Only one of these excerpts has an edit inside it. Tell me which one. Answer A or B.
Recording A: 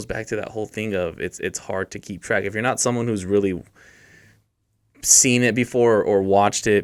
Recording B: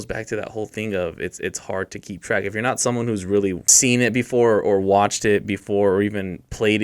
B